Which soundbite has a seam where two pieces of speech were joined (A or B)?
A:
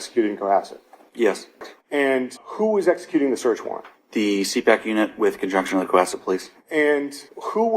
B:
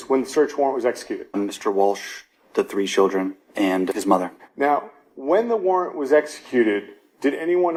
A